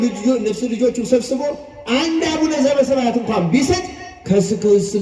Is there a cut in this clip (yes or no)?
no